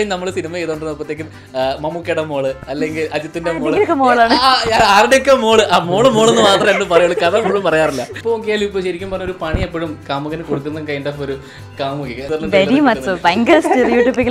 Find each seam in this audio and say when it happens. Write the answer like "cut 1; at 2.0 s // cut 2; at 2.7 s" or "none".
cut 1; at 8.1 s // cut 2; at 12.2 s